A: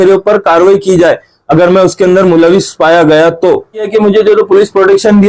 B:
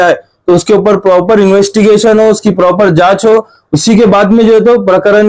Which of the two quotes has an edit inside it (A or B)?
A